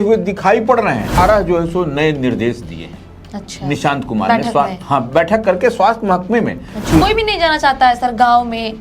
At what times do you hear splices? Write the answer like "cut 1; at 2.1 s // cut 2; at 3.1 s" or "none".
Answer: cut 1; at 1.2 s // cut 2; at 7.0 s